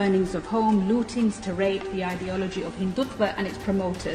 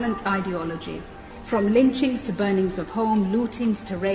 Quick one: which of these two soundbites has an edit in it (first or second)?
second